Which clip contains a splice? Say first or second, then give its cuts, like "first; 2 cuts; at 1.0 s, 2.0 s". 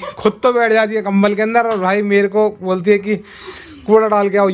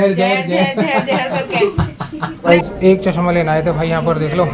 second; 1 cut; at 2.3 s